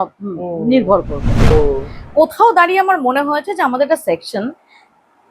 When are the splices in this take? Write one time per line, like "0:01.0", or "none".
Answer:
0:01.5